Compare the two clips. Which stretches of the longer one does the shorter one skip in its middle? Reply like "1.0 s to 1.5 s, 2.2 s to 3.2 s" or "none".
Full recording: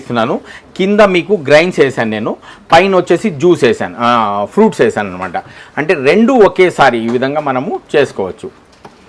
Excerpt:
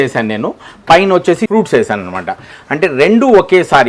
3.3 s to 4.5 s